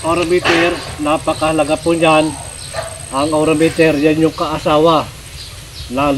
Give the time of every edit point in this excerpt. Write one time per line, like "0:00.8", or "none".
none